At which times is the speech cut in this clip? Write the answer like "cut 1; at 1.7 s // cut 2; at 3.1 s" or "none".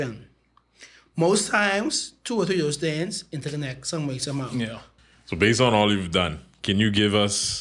cut 1; at 4.9 s